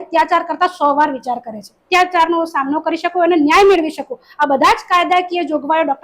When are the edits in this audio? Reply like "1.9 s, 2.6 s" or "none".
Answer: 1.8 s